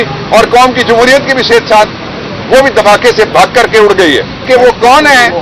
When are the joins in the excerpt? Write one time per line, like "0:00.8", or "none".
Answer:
0:04.5